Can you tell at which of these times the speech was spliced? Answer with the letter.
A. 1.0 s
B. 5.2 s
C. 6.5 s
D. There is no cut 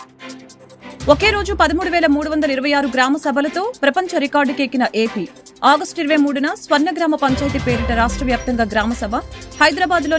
A